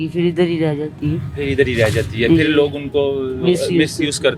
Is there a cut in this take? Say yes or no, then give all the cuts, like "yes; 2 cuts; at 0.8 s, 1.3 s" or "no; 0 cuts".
no; 0 cuts